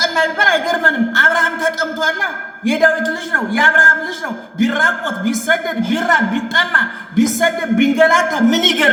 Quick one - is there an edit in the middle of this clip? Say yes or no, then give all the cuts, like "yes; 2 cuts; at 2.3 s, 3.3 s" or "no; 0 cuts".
no; 0 cuts